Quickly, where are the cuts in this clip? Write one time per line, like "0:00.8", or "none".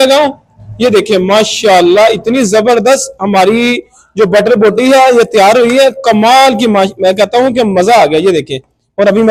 none